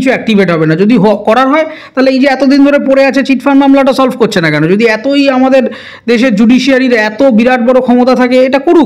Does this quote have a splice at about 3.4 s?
no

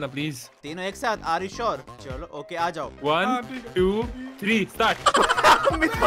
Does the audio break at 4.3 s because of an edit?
no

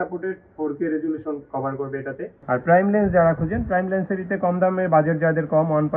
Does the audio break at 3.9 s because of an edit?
no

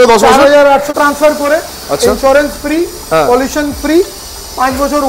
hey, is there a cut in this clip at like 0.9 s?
yes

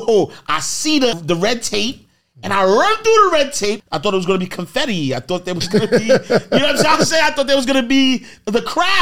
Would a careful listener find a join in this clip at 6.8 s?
no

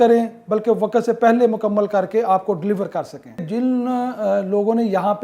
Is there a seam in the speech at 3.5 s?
yes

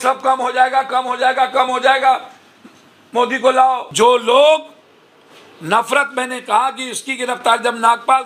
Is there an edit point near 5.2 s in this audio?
no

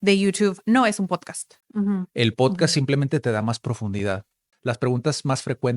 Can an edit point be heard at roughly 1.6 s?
yes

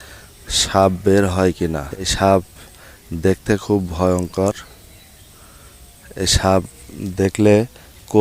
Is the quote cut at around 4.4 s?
no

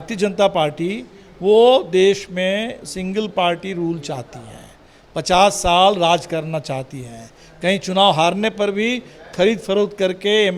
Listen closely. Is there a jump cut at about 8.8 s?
no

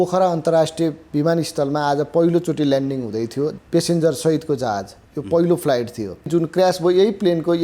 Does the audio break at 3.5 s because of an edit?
yes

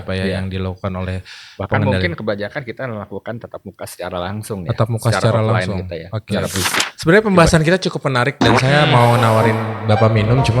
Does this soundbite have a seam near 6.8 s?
yes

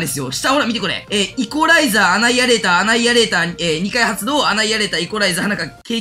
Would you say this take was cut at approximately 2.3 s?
no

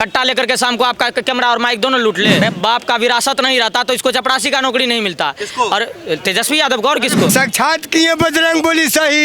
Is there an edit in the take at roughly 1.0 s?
no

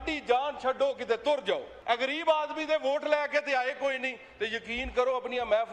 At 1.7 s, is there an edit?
yes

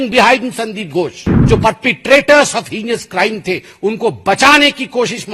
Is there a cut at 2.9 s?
no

